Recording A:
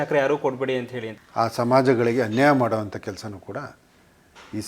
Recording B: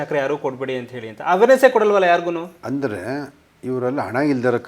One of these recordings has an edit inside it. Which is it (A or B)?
A